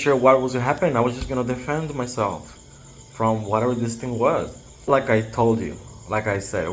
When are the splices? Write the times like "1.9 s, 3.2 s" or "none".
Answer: 4.9 s